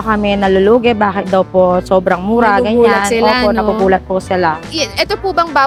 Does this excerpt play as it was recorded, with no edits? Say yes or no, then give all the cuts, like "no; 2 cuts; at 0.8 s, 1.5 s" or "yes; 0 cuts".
yes; 0 cuts